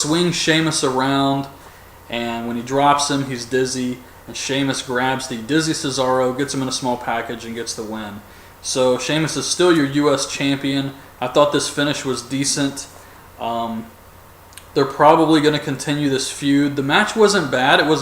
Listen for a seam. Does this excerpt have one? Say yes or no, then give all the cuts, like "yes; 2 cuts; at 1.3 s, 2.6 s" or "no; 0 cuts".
yes; 1 cut; at 10.4 s